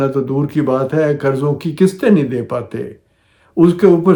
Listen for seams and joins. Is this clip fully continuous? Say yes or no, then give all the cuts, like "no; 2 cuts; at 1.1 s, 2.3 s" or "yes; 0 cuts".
yes; 0 cuts